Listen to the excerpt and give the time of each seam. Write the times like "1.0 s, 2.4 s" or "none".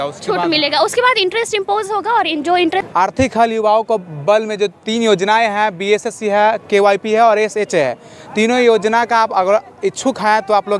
2.9 s